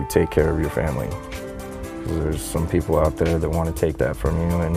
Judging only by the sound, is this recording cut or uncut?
uncut